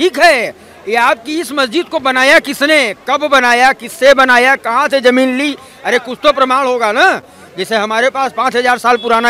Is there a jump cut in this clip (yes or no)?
no